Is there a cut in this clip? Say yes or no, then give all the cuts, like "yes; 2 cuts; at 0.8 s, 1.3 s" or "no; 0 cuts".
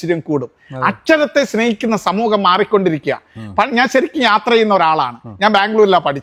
no; 0 cuts